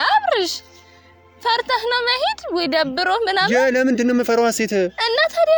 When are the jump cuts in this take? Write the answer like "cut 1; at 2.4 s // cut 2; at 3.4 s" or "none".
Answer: none